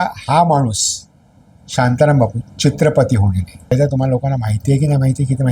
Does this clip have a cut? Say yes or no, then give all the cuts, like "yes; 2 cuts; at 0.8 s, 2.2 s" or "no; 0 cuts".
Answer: yes; 1 cut; at 3.7 s